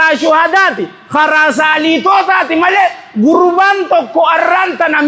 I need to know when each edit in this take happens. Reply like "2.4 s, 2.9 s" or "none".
none